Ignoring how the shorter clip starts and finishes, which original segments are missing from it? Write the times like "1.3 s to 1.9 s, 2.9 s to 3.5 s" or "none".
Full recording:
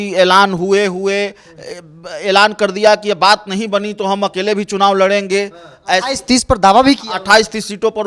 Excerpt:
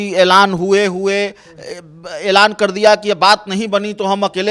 none